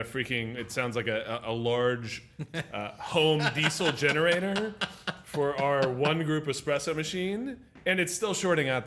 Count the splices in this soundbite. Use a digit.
0